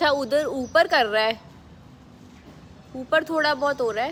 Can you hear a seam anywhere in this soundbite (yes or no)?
no